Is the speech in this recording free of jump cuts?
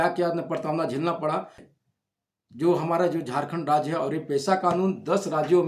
no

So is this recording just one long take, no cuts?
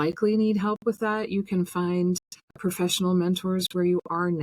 no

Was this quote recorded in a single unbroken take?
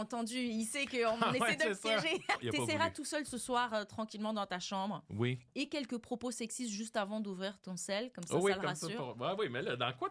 no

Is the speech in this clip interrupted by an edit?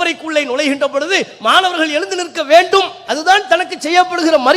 no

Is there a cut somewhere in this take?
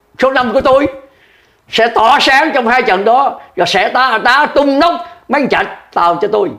no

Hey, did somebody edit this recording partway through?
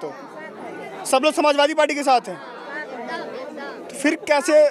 no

